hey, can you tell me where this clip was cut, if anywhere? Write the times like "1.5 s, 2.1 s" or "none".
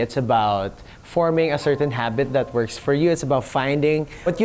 none